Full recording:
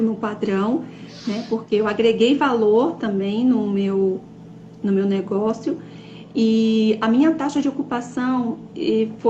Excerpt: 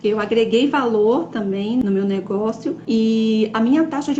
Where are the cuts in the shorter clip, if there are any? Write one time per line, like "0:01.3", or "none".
0:01.8
0:02.8

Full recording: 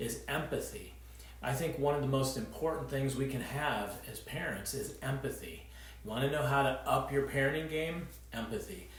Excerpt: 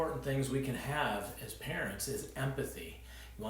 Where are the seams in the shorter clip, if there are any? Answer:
none

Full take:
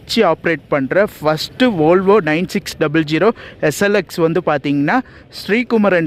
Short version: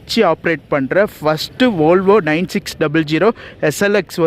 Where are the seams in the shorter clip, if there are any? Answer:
none

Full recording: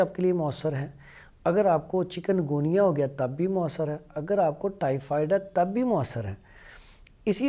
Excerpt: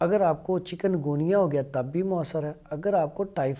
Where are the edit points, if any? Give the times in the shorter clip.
none

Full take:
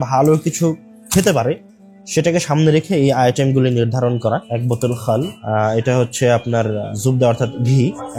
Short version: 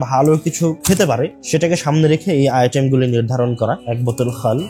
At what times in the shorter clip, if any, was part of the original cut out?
0:01.0

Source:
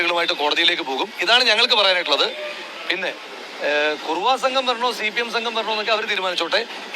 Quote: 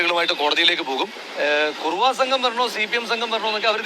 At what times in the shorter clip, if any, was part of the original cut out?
0:01.2

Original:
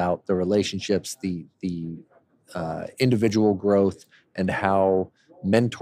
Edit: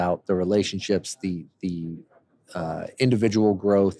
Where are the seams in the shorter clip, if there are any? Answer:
none

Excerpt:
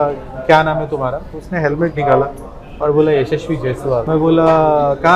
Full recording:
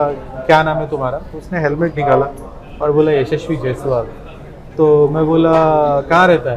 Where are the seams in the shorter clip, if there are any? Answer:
0:04.1

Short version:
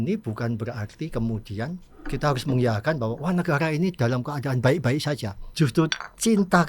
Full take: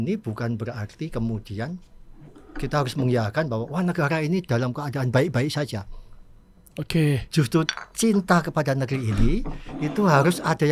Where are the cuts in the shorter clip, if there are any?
0:01.9
0:05.5

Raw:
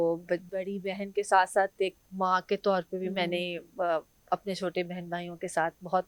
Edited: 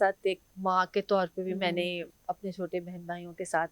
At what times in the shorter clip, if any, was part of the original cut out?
0:02.1

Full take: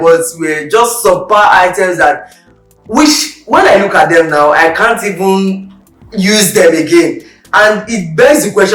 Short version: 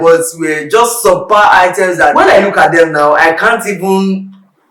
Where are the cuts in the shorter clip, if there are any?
0:02.1

